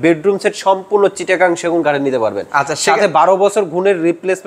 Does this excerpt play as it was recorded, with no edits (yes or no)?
yes